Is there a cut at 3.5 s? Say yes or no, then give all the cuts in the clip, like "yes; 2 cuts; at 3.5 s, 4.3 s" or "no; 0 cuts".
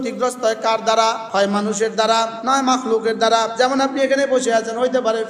yes; 3 cuts; at 1.2 s, 2.4 s, 3.5 s